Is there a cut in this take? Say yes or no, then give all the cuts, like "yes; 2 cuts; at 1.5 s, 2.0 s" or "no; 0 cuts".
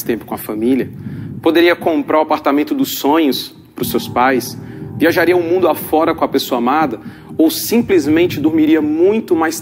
no; 0 cuts